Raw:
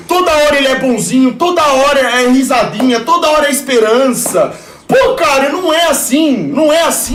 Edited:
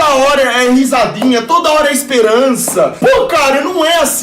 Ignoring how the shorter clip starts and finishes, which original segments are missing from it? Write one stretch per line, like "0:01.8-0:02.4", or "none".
0:04.5-0:04.8

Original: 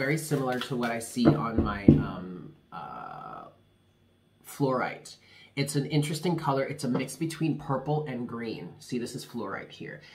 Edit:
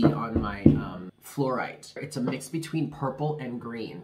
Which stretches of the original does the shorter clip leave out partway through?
0:02.4-0:04.4
0:05.3-0:06.7

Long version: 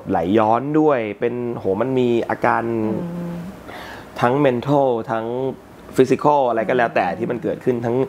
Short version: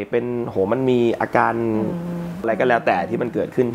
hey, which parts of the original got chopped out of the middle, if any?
0:03.5-0:06.5

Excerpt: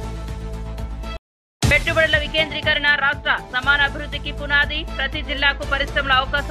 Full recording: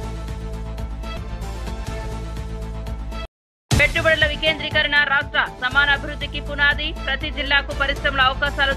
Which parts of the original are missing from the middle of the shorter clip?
0:01.1-0:03.2

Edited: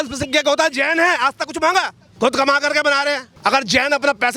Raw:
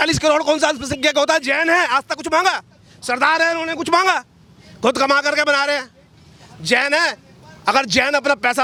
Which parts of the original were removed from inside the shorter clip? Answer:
0:02.7-0:04.6
0:05.9-0:07.5

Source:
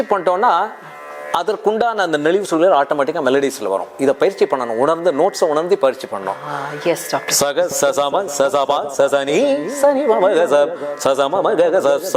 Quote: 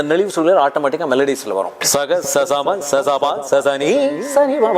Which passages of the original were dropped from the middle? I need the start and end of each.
0:03.9-0:07.2

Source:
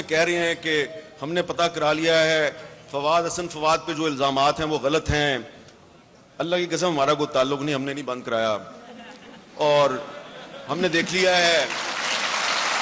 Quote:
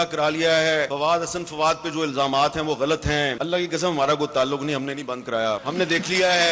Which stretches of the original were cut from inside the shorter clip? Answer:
0:02.5-0:02.9
0:05.4-0:06.4
0:08.6-0:10.7

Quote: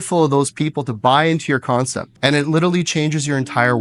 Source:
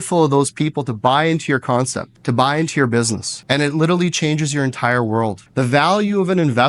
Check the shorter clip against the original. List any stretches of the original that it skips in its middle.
0:02.0-0:03.3

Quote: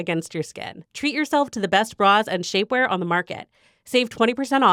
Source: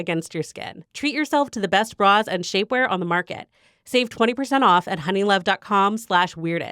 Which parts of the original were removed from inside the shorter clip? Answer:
none

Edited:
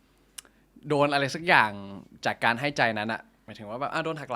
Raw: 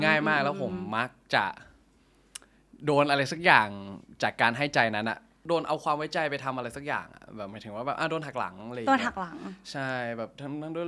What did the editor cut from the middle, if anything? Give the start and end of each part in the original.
0:05.3-0:07.4

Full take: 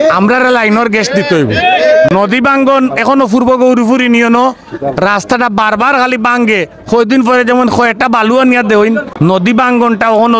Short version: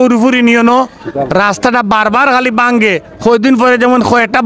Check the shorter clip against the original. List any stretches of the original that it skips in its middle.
none

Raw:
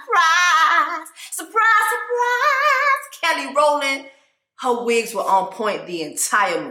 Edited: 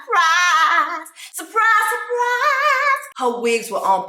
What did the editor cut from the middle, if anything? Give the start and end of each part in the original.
0:03.1-0:04.5

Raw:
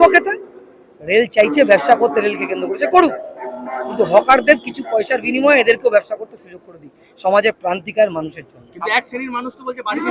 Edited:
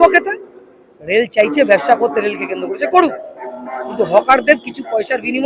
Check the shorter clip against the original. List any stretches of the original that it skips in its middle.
none

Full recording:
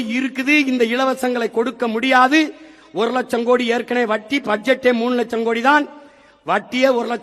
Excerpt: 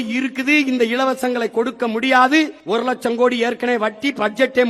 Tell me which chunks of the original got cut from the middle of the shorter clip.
0:02.6-0:02.9

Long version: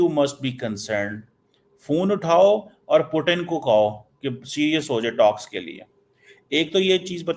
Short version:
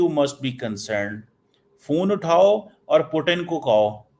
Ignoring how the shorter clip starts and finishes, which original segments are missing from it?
none

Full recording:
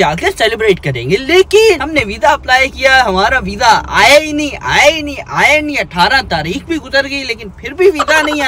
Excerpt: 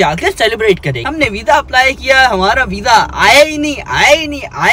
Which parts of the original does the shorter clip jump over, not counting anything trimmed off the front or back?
0:01.0-0:01.8

